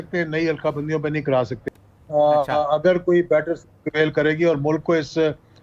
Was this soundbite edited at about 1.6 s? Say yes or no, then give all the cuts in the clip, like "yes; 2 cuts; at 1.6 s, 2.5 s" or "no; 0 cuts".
yes; 1 cut; at 1.6 s